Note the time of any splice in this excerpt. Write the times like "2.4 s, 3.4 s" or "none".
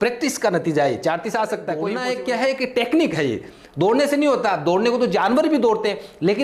1.8 s